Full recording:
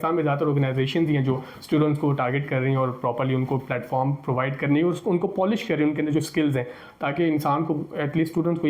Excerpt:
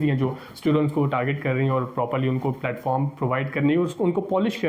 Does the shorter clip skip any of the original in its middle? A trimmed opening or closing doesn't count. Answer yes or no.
no